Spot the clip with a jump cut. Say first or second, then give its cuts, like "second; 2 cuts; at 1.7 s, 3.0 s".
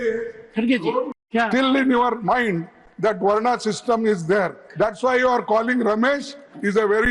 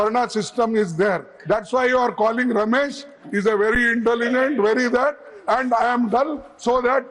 first; 1 cut; at 1.1 s